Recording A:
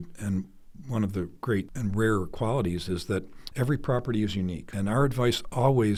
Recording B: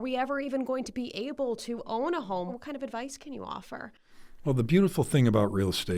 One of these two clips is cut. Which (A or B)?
B